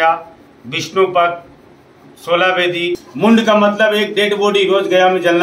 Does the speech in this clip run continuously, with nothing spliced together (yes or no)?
no